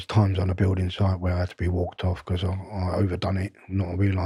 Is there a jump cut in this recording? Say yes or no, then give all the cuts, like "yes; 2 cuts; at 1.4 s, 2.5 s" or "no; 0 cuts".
no; 0 cuts